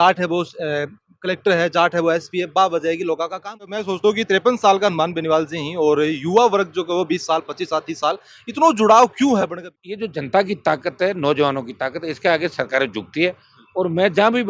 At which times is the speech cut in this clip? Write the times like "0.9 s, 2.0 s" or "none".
3.8 s, 9.8 s